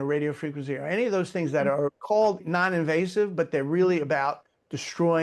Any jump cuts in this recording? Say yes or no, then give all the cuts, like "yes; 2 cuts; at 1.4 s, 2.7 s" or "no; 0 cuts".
yes; 1 cut; at 2.4 s